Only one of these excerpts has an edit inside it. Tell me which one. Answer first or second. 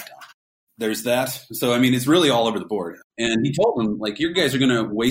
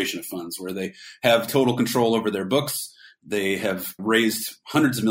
first